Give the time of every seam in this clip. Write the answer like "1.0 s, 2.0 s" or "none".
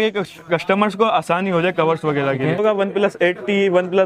2.6 s